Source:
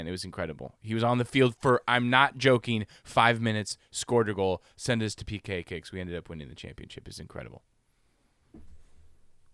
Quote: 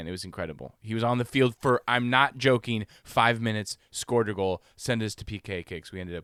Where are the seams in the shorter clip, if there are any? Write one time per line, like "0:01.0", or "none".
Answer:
none